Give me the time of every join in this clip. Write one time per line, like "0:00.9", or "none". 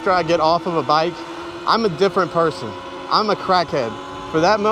none